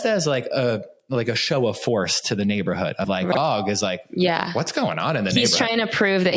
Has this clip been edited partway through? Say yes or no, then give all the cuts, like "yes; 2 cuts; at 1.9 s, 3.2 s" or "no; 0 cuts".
yes; 1 cut; at 3.2 s